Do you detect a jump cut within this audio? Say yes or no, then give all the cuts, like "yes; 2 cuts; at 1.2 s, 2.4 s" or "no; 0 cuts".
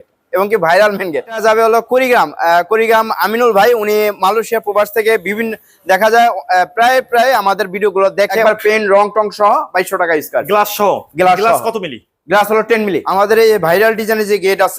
yes; 3 cuts; at 1.4 s, 8.4 s, 13.0 s